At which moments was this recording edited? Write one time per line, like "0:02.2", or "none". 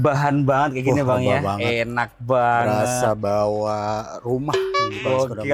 none